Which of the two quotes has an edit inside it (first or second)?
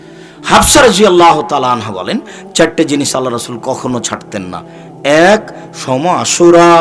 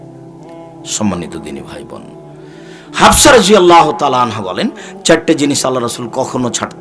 second